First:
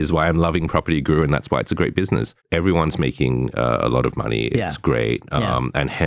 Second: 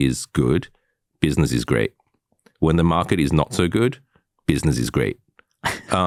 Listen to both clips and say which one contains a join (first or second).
first